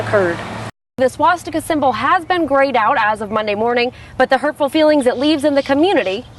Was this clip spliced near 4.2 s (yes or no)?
no